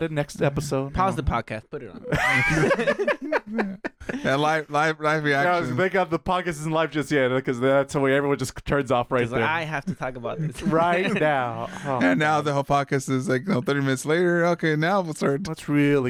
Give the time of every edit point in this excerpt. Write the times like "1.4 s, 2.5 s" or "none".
none